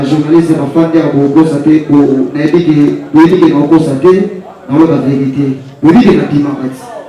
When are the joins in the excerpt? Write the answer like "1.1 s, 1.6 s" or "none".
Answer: none